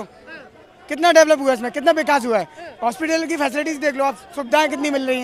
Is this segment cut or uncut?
uncut